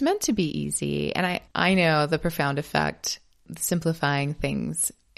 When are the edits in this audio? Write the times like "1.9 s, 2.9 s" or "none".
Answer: 1.4 s